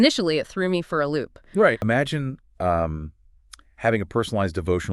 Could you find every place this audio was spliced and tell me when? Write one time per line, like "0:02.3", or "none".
0:01.8